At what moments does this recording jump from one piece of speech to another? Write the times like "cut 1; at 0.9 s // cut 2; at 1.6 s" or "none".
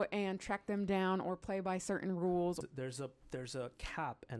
cut 1; at 2.6 s